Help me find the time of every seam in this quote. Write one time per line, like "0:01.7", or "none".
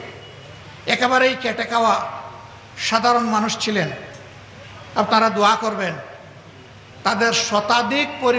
none